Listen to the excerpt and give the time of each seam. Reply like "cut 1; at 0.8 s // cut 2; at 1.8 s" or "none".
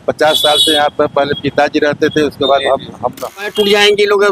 cut 1; at 3.4 s